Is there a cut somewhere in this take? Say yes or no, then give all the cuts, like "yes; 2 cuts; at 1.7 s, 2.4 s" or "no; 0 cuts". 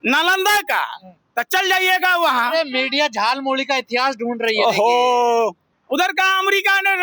yes; 1 cut; at 5.7 s